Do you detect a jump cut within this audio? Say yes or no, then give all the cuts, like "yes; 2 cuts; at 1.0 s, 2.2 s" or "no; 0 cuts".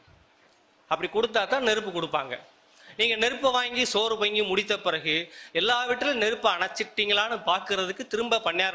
no; 0 cuts